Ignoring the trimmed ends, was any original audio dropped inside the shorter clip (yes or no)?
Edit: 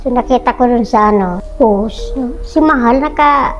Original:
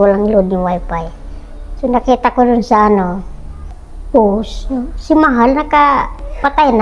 yes